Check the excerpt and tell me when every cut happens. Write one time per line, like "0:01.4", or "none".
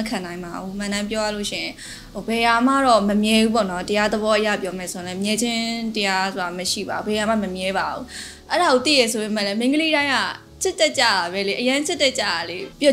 none